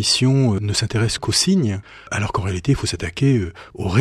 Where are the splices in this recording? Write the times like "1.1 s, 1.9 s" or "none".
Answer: 1.9 s

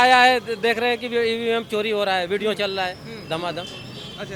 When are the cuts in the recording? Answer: none

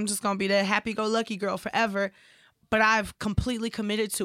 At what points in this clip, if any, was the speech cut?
none

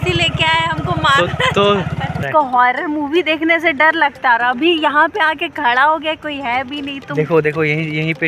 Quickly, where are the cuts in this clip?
2.2 s

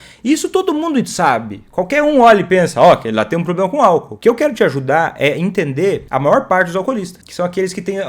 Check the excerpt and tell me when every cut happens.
4.1 s, 6.1 s, 7.2 s

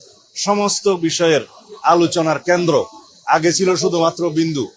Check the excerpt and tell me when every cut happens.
none

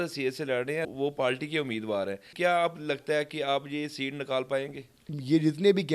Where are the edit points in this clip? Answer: 0.9 s, 2.3 s

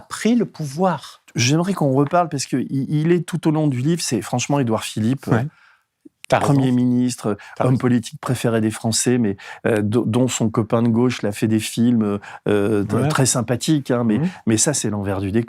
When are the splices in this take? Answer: 1.3 s

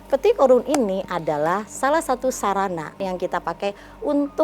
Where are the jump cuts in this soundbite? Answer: 3.0 s

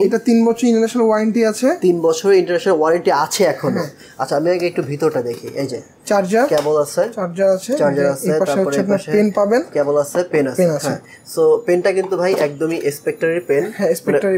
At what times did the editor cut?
none

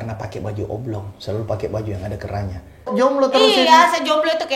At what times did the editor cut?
2.9 s

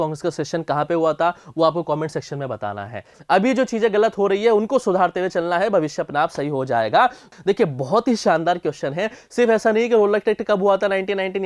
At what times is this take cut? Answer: 3.1 s, 7.3 s

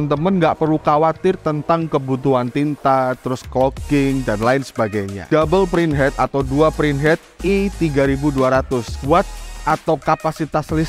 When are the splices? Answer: 5.2 s, 8.9 s

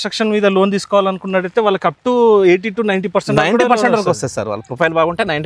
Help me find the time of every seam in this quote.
none

